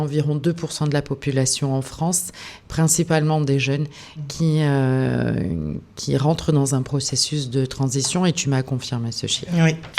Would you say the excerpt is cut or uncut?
uncut